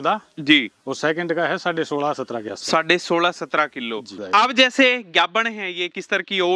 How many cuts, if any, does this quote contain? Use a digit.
1